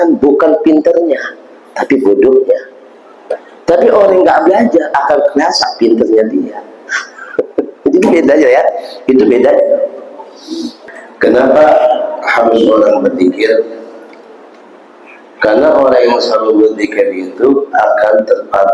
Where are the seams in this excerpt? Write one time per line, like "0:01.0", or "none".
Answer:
0:10.8